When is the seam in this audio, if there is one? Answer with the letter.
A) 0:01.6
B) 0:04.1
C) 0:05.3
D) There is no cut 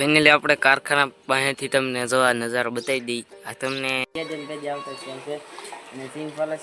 B